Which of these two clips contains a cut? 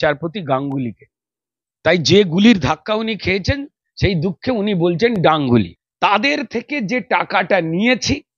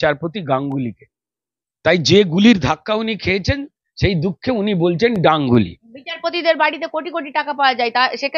first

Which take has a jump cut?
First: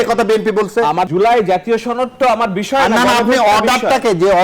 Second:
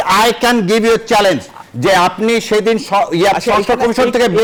first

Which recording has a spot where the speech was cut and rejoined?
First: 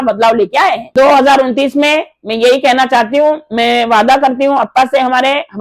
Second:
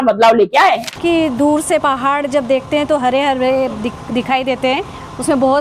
second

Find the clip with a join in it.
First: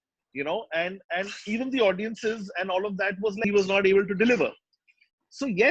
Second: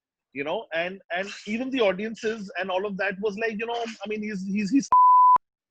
first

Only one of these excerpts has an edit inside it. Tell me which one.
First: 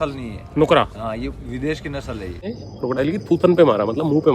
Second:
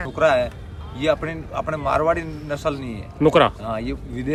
first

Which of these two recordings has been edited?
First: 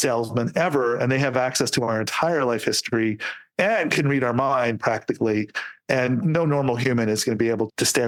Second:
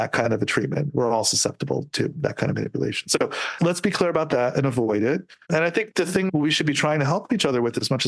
second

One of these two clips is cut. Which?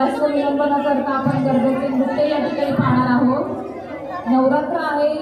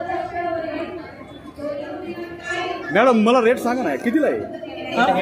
second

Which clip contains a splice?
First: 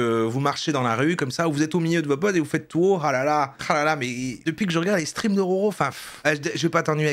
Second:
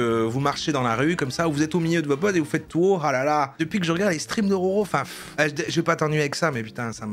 second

